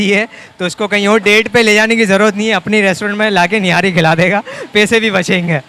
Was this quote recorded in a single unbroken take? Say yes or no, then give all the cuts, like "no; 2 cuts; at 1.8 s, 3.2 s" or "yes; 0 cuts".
yes; 0 cuts